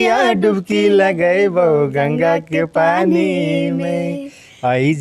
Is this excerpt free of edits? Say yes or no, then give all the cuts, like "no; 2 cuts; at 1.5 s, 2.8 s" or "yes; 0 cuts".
yes; 0 cuts